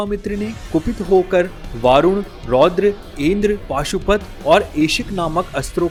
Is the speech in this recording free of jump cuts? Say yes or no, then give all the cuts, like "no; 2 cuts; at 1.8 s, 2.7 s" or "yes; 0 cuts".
yes; 0 cuts